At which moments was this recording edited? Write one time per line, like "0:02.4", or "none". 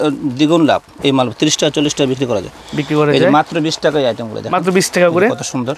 none